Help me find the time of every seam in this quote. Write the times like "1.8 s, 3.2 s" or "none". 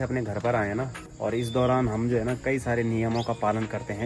1.0 s